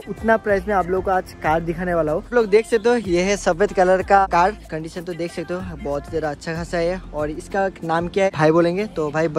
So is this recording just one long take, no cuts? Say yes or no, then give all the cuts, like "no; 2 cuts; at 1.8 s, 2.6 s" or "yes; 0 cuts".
yes; 0 cuts